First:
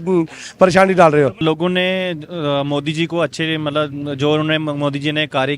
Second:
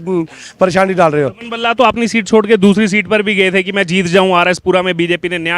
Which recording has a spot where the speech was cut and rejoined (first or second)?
first